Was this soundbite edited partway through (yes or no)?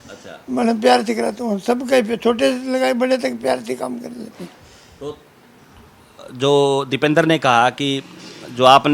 no